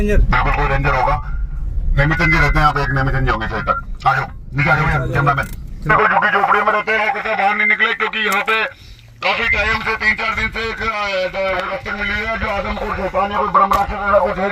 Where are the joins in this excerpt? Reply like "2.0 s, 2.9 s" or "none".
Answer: none